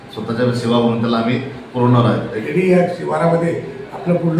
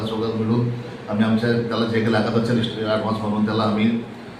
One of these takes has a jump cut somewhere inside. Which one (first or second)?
first